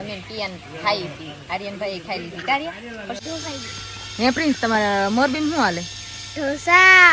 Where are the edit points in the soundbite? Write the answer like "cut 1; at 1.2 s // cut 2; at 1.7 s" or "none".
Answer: cut 1; at 3.2 s